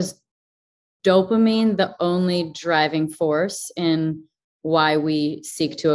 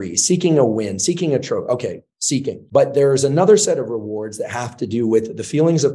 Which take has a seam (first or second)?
second